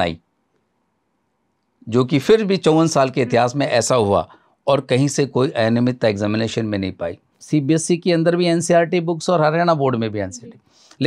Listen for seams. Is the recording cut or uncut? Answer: cut